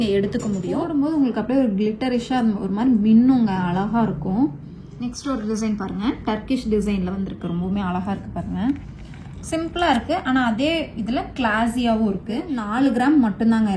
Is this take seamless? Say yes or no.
no